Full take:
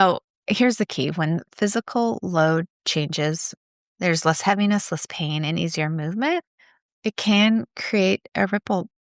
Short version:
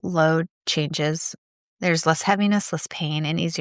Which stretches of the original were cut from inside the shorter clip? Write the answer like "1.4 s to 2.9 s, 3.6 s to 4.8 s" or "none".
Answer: none

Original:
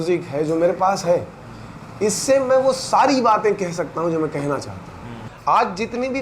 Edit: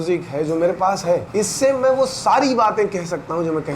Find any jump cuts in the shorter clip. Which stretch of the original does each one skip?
1.3 s to 1.9 s

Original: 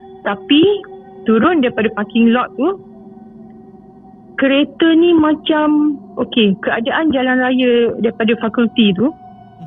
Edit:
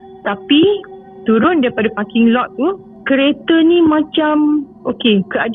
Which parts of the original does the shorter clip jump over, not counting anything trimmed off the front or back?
2.9 s to 4.2 s

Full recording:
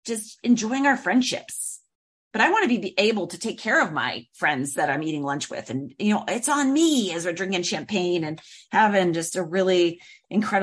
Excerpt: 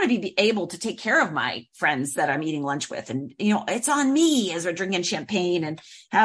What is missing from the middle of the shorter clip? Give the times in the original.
none

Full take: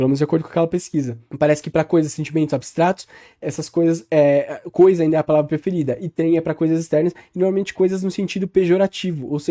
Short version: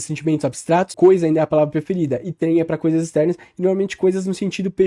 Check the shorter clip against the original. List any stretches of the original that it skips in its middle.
3.0 s to 4.7 s

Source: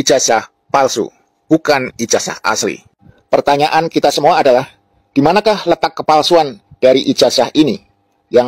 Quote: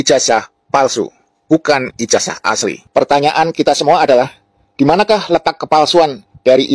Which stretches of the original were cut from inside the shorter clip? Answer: 2.8 s to 3.2 s

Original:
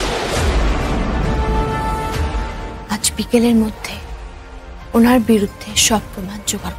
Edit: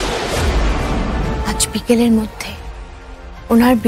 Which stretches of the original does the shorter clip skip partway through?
1.4 s to 2.8 s

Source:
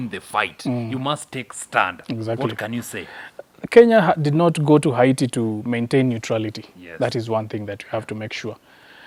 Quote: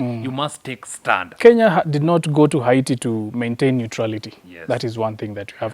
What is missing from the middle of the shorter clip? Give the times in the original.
2.0 s to 3.6 s

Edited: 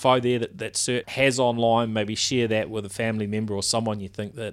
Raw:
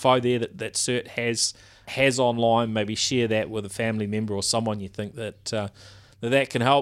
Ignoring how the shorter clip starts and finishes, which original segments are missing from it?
1.1 s to 1.9 s

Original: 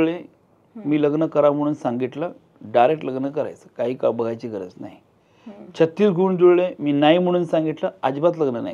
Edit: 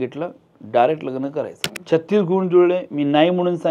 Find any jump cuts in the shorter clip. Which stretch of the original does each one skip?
3.6 s to 5.5 s

